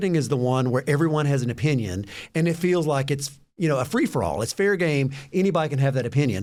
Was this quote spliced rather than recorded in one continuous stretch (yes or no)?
no